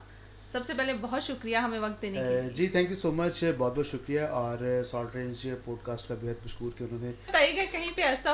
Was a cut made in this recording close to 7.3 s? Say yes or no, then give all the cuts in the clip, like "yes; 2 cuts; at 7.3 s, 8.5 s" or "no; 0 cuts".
yes; 1 cut; at 7.3 s